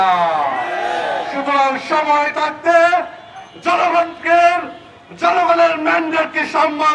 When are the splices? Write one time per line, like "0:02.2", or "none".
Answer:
none